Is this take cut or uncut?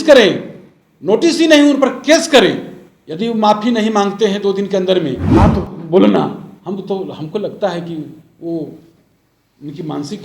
cut